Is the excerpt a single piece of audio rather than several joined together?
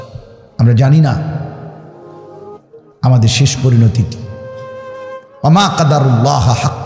no; 2 cuts; at 1.6 s, 3.0 s

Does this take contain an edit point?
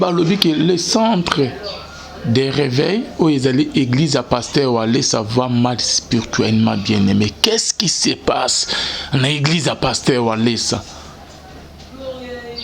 yes; 1 cut; at 11.4 s

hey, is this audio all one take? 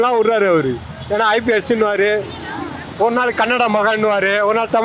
yes; 0 cuts

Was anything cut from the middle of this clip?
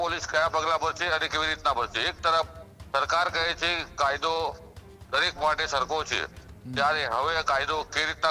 no; 0 cuts

